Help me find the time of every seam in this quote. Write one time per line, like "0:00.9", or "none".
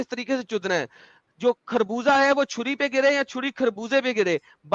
none